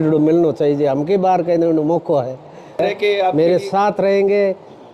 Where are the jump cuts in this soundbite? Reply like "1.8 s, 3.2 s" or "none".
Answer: 2.8 s